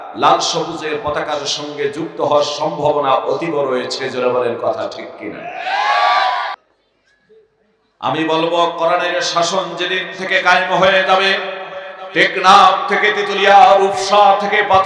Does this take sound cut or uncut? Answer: cut